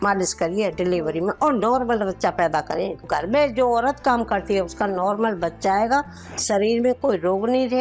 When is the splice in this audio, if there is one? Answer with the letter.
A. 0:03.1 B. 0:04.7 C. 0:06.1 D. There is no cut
A